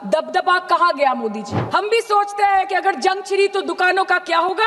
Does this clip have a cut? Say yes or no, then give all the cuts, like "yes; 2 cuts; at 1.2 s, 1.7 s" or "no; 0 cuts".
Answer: yes; 1 cut; at 1.5 s